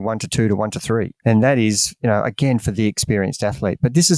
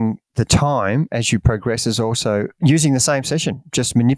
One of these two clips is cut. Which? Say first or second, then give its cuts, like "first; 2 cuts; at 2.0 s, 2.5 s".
first; 1 cut; at 1.1 s